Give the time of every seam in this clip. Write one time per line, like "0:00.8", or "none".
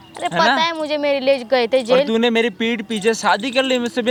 none